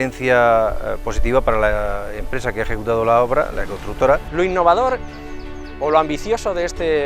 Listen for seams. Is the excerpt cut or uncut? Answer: cut